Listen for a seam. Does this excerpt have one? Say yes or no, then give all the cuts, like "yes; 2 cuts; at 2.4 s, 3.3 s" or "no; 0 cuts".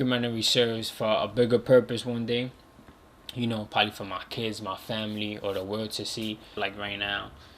yes; 1 cut; at 6.6 s